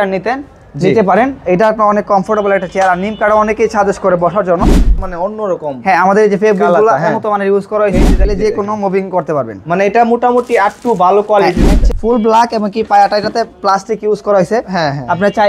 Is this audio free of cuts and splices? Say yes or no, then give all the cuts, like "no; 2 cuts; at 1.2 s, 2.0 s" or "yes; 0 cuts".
no; 3 cuts; at 5.0 s, 8.3 s, 11.8 s